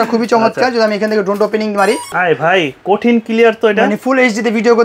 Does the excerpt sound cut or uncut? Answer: cut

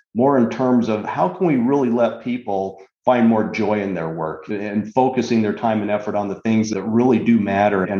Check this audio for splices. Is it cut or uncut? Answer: cut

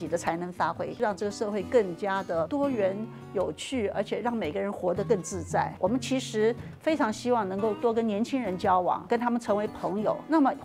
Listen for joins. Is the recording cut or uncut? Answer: cut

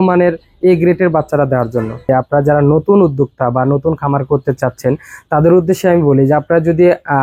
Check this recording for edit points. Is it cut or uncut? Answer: cut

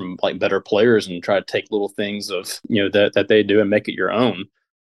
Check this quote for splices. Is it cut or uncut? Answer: uncut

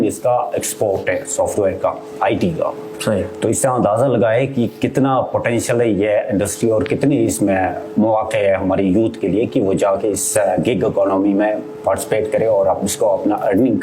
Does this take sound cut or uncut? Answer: uncut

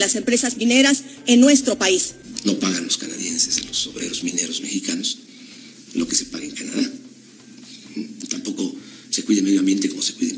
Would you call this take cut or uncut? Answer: cut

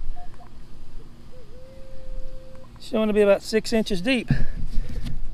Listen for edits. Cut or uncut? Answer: uncut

